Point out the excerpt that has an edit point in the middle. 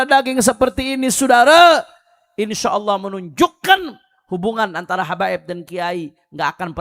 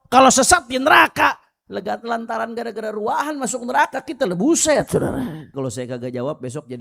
second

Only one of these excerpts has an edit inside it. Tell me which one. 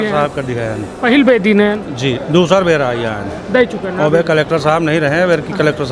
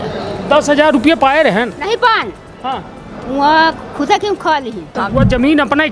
second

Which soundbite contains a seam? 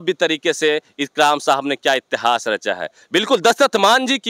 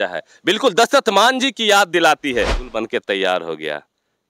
second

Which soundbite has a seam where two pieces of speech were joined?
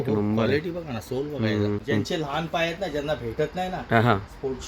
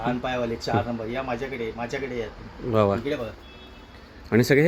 first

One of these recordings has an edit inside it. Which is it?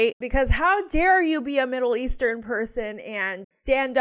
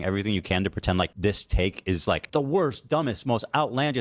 second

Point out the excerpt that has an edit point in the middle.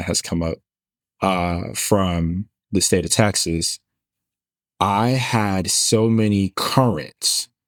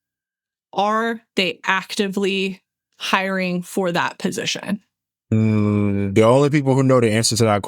second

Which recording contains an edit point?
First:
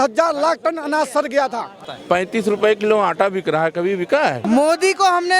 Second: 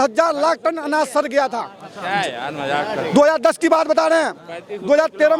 first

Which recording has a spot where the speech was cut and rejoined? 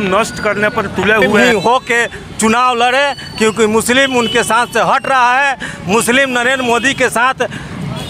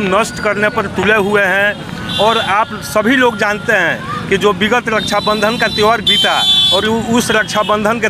first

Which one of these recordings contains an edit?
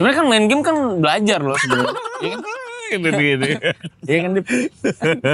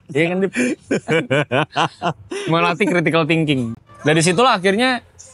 second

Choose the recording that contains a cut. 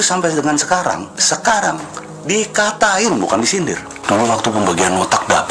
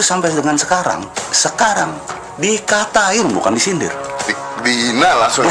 first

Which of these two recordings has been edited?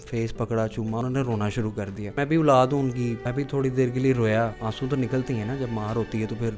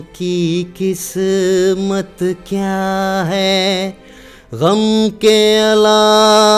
first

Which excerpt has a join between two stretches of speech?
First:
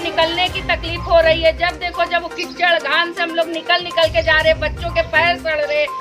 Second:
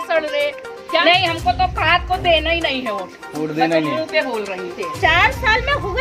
second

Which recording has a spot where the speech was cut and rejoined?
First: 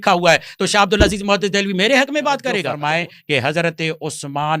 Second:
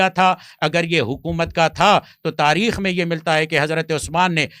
first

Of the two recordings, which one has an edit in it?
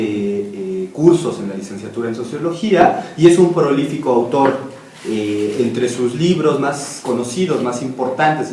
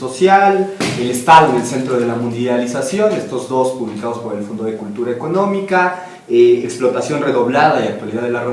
first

